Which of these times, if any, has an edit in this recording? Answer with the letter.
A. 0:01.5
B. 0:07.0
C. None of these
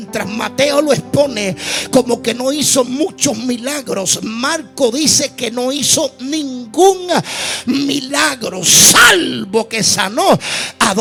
C